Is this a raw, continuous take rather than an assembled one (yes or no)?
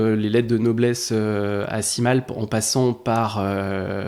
yes